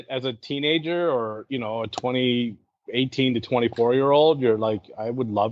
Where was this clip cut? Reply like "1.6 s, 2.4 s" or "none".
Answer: none